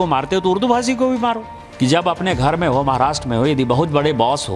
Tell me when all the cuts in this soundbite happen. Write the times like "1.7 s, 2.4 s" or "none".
1.6 s